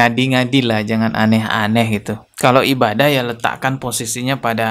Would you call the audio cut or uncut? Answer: uncut